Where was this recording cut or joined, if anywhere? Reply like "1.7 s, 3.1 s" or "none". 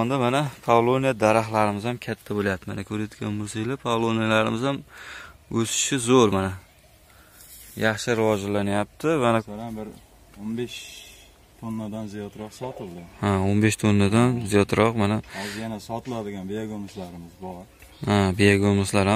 9.5 s